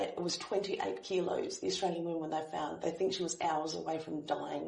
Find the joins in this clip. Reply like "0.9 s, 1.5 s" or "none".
none